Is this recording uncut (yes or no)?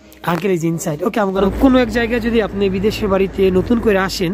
no